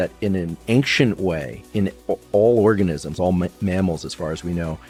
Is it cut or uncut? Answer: uncut